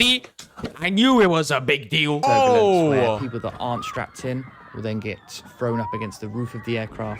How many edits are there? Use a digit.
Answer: 1